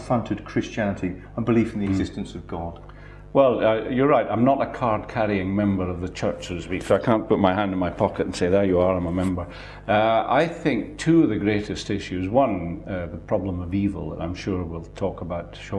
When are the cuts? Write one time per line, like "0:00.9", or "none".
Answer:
0:10.1